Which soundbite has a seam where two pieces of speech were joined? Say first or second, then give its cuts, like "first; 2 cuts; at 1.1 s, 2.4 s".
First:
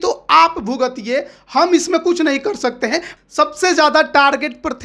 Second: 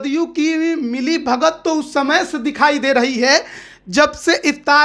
first; 1 cut; at 3.1 s